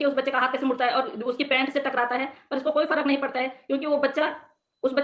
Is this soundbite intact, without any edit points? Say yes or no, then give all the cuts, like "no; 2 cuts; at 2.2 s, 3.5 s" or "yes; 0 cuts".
yes; 0 cuts